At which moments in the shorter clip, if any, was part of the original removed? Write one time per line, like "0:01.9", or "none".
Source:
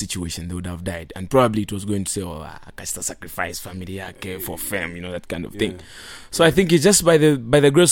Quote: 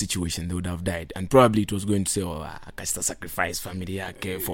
none